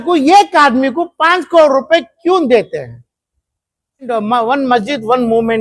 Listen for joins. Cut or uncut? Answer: cut